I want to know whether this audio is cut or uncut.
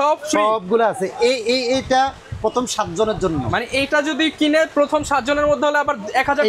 uncut